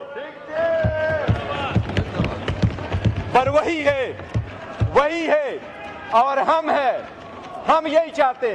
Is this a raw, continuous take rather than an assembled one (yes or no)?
yes